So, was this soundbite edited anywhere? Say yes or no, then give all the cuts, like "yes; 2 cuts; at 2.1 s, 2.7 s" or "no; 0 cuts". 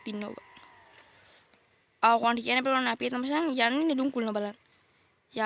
no; 0 cuts